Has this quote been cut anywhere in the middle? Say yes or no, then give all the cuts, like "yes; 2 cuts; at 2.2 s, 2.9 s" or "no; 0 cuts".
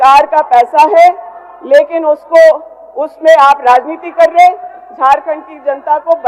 no; 0 cuts